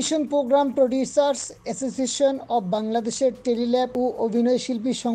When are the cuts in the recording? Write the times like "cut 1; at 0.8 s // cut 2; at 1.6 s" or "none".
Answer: cut 1; at 3.9 s